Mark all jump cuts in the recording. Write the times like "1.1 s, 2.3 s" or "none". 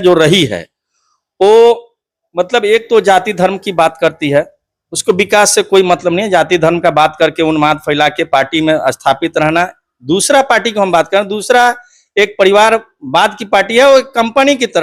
none